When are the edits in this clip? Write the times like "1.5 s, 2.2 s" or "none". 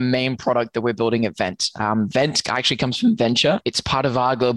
3.6 s